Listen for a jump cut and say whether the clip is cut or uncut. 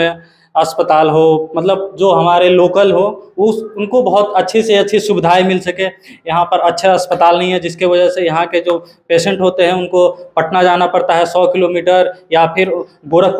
uncut